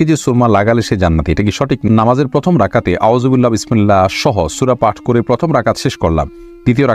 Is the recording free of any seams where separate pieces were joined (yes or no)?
no